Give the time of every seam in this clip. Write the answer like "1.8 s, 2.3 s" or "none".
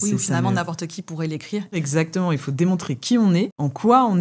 1.8 s